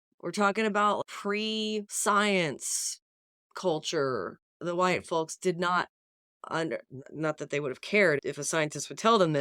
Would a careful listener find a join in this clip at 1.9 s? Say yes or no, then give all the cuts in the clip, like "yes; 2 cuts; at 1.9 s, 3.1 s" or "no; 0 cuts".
yes; 3 cuts; at 1.9 s, 4.6 s, 8.2 s